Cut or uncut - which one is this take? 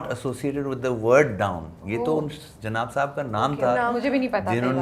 uncut